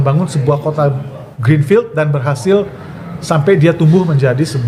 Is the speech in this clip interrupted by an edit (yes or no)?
no